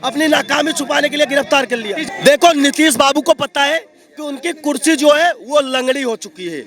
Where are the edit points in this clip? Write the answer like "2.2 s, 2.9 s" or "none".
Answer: 2.0 s